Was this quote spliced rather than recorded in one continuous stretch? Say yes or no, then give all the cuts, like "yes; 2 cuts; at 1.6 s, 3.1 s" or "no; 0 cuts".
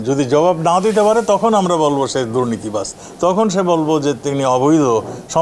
no; 0 cuts